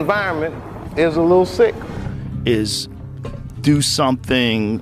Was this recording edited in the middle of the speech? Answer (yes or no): yes